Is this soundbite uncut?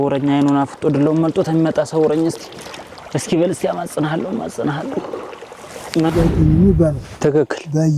no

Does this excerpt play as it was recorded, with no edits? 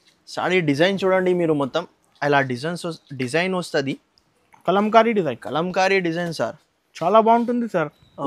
yes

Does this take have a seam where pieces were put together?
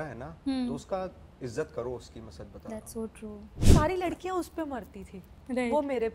yes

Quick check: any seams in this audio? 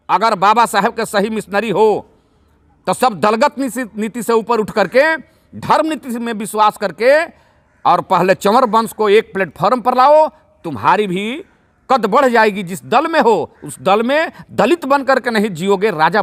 no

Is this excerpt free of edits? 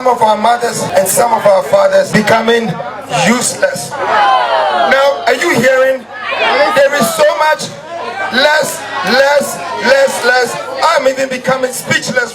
no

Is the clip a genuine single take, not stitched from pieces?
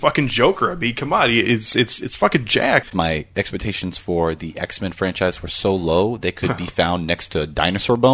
no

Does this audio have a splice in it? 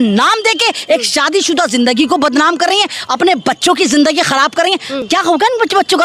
no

